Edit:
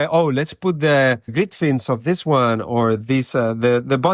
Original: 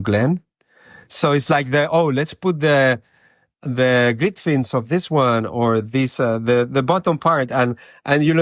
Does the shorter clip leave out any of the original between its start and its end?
yes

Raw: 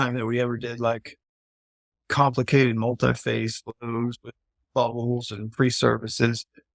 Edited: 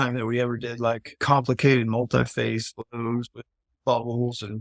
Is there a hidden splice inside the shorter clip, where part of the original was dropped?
yes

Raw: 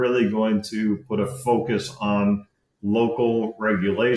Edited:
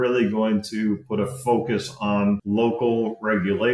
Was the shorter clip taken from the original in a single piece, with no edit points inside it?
no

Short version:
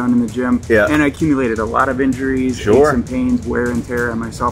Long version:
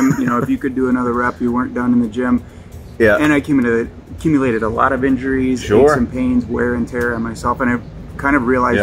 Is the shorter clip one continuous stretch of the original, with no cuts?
no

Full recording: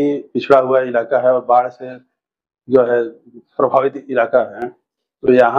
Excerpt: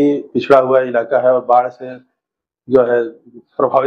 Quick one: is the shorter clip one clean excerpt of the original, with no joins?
yes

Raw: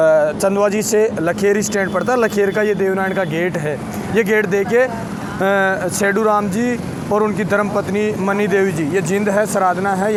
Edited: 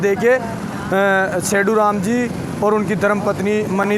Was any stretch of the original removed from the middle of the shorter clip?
no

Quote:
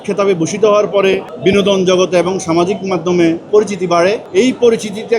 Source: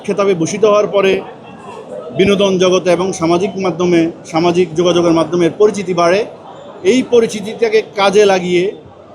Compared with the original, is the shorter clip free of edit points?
no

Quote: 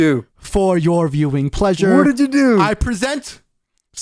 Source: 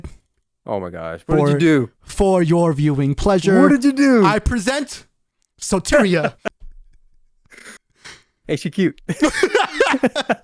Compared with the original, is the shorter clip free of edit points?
yes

